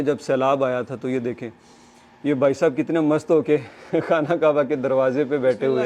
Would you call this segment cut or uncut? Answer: uncut